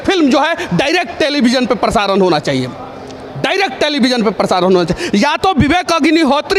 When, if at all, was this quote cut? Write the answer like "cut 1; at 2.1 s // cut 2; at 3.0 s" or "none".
none